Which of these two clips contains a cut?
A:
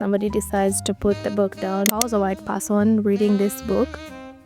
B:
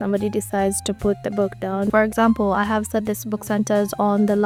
A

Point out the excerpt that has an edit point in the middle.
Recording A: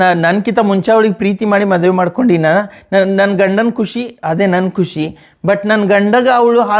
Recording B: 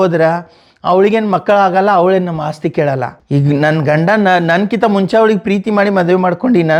B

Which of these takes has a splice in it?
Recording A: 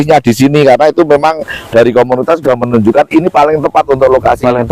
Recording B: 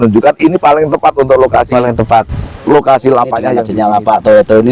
B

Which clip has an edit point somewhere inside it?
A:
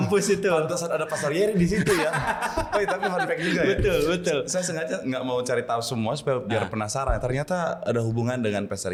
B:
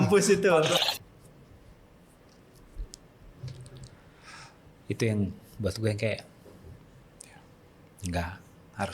B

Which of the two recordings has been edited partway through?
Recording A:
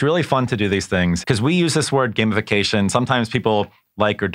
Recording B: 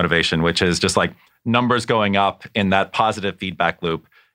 A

